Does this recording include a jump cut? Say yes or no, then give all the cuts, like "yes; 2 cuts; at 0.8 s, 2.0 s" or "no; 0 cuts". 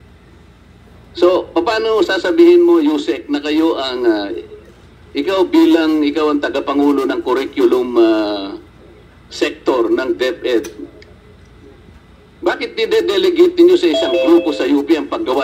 no; 0 cuts